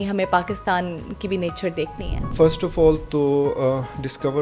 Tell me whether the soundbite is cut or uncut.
cut